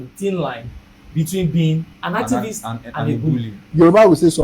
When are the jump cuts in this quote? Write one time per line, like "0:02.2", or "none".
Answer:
0:01.9
0:03.6